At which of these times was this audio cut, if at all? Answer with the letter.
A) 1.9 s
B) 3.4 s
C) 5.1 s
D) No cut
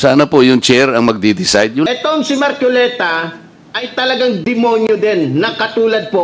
A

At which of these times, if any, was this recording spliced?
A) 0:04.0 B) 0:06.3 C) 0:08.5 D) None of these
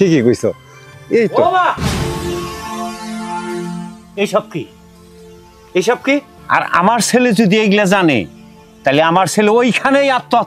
B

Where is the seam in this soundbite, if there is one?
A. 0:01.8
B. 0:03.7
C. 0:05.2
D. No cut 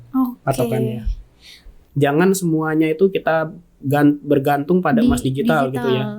A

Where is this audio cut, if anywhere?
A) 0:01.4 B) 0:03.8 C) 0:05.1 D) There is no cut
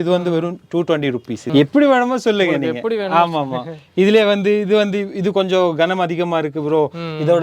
A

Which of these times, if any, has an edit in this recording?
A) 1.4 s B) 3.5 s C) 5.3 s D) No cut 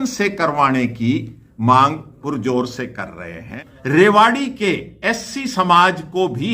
B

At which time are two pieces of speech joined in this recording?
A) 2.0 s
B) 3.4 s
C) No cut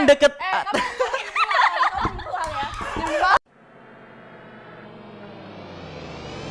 B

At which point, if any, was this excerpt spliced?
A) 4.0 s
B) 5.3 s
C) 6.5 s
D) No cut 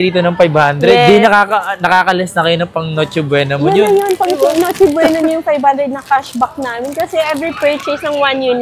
D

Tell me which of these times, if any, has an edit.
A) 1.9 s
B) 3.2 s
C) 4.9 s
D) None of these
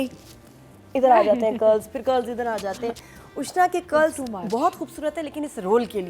D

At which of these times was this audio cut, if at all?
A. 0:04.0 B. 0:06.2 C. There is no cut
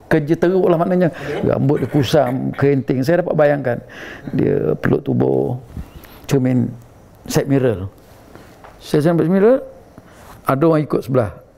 B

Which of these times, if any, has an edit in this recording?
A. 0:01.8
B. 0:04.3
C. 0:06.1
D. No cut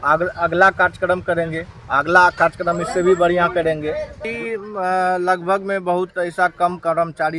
B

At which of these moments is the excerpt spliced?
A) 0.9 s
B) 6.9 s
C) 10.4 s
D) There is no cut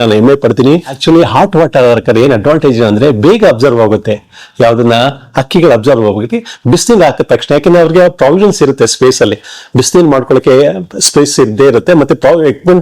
A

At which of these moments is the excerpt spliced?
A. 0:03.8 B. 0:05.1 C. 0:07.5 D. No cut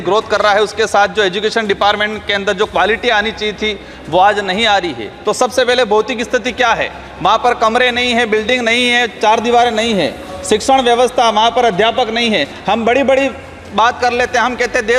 B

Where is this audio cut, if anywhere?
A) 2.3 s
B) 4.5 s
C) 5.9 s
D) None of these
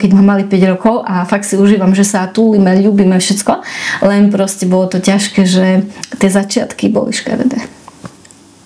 D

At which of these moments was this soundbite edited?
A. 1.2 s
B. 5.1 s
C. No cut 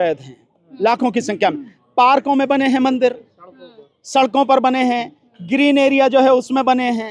C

